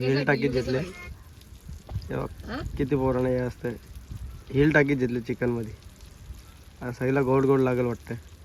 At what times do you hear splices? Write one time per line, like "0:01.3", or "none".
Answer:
none